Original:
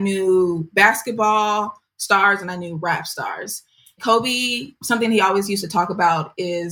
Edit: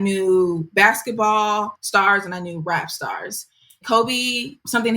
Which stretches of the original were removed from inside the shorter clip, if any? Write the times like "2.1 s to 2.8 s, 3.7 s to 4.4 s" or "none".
1.8 s to 1.9 s